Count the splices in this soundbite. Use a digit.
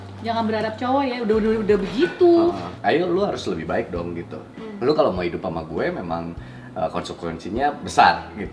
1